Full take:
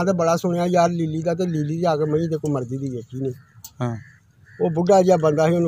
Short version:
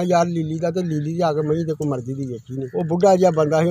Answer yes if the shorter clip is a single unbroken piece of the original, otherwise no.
no